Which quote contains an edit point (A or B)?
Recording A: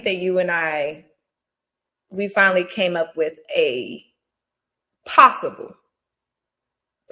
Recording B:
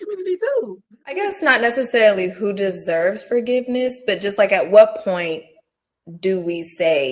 B